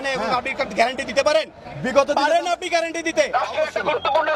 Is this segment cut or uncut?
cut